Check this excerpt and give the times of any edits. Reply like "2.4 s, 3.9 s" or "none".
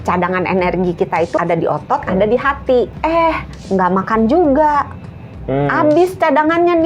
1.4 s, 2.9 s